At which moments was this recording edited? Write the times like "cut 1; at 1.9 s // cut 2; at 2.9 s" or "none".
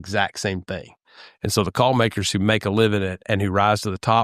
none